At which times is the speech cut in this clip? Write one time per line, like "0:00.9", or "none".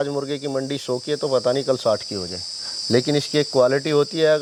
none